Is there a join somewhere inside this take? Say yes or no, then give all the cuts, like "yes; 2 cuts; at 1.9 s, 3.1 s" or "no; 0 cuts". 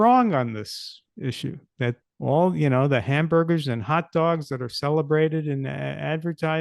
yes; 1 cut; at 2.0 s